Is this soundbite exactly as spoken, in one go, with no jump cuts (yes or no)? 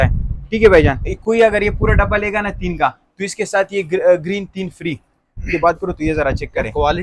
no